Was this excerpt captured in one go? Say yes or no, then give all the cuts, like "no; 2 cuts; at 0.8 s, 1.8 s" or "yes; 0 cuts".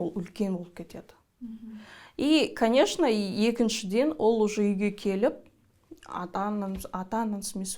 yes; 0 cuts